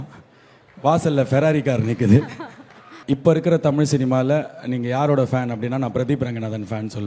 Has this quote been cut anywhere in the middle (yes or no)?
yes